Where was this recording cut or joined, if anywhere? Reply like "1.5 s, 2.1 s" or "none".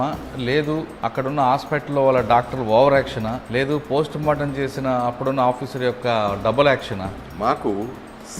0.9 s, 3.4 s, 7.2 s